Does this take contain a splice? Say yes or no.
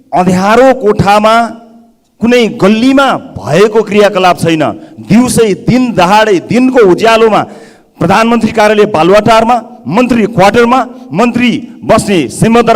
no